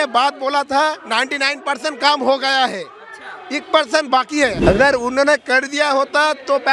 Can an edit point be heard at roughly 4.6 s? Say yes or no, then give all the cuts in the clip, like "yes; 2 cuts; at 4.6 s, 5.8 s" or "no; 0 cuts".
yes; 1 cut; at 4.6 s